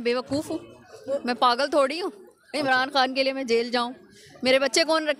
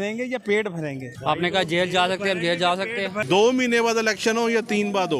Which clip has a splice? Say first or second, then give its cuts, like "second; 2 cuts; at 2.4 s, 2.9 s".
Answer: second; 2 cuts; at 1.1 s, 3.2 s